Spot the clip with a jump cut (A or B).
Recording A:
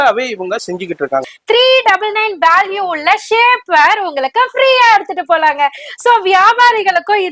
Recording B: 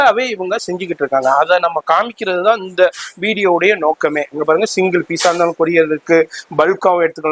A